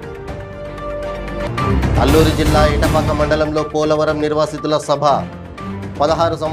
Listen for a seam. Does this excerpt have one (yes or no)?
yes